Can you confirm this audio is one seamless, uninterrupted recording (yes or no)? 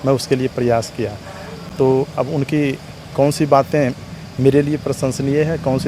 yes